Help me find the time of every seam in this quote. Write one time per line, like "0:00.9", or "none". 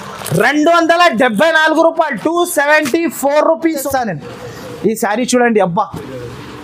0:03.8